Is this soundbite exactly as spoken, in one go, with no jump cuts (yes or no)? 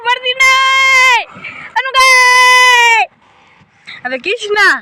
yes